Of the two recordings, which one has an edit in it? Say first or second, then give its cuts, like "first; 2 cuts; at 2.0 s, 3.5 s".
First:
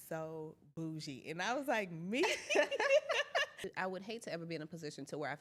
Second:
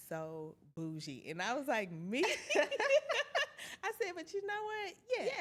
first; 1 cut; at 3.6 s